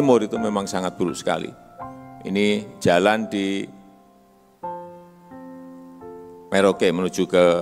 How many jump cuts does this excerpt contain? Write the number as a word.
two